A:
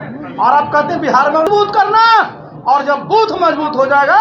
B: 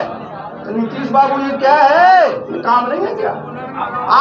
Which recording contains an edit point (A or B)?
A